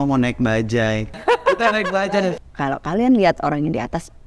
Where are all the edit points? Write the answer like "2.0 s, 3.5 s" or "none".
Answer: 1.1 s, 2.3 s